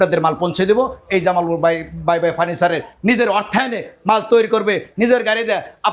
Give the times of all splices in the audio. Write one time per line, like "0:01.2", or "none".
none